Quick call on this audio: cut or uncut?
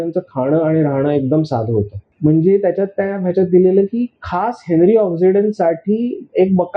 cut